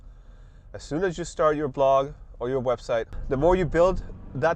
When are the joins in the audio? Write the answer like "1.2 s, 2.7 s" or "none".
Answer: 3.1 s